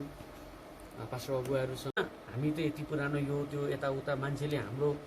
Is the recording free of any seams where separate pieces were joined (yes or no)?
no